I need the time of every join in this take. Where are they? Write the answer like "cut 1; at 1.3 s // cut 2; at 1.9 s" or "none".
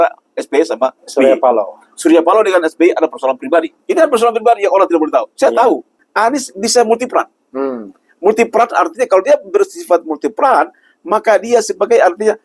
cut 1; at 1.0 s // cut 2; at 3.8 s // cut 3; at 6.0 s